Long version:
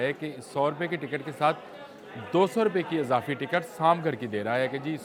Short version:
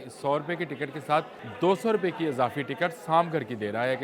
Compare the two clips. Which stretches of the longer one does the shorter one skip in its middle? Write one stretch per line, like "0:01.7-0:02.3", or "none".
0:01.7-0:02.1